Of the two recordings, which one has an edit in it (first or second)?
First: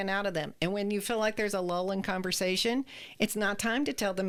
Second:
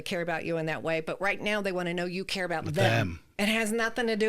second